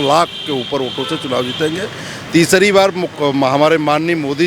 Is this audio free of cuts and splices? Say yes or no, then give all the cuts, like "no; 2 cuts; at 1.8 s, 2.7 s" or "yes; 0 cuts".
yes; 0 cuts